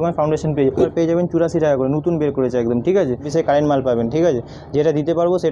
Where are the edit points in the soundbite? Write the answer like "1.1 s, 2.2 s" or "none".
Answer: 0.9 s, 3.3 s